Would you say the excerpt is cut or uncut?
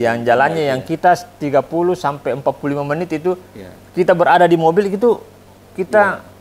uncut